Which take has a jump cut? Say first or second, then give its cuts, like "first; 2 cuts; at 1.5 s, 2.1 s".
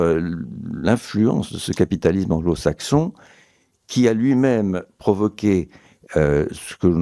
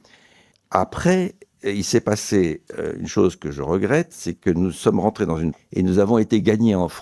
second; 1 cut; at 5.5 s